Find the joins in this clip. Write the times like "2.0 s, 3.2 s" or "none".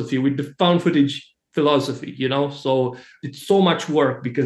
3.1 s